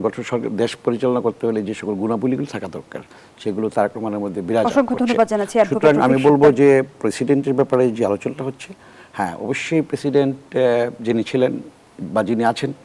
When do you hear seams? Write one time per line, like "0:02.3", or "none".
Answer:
none